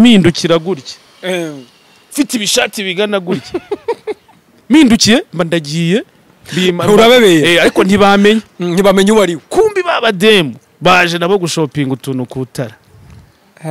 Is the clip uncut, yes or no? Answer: yes